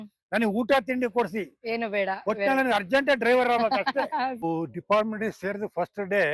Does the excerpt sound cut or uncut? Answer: cut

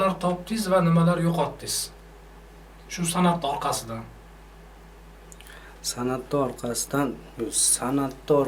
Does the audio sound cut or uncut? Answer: uncut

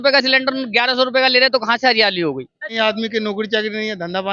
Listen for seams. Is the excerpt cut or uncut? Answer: cut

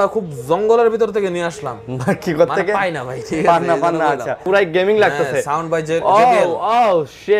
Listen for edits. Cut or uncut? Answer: cut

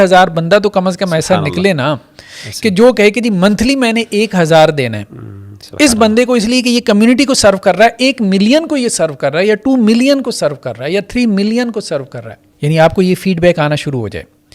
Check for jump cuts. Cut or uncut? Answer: cut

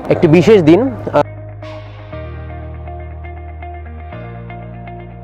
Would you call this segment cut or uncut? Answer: uncut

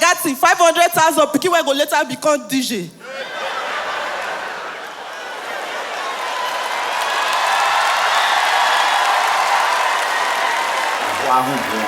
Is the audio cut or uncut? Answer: cut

